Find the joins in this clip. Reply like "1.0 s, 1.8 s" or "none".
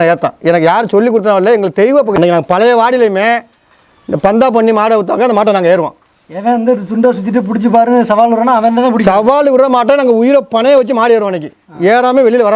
2.1 s